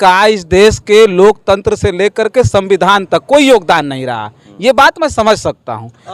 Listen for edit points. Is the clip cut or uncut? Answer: uncut